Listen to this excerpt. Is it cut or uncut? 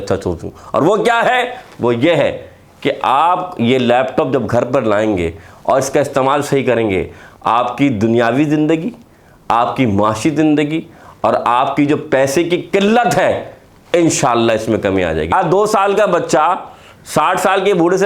cut